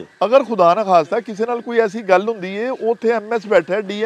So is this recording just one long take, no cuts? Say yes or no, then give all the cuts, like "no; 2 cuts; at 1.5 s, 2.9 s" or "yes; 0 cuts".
yes; 0 cuts